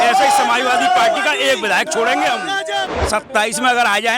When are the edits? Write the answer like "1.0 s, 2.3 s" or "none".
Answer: 2.8 s